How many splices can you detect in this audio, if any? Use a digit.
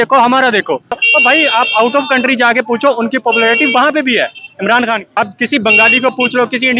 2